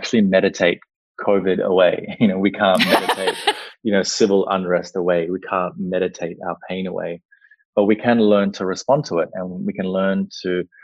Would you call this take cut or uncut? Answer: uncut